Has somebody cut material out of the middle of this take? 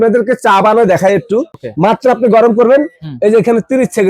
yes; 1 cut; at 1.6 s

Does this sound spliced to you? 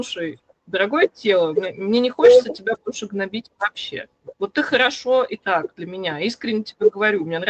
no; 0 cuts

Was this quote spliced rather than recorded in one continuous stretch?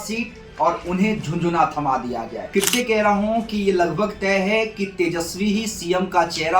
yes; 1 cut; at 2.4 s

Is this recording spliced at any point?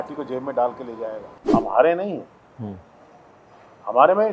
yes; 1 cut; at 1.3 s

